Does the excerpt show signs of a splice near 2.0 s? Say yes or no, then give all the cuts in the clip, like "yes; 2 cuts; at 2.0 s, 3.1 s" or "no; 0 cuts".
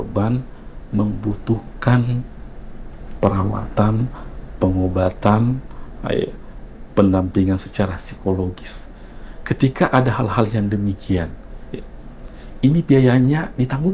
no; 0 cuts